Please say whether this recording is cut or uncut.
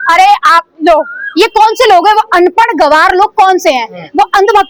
uncut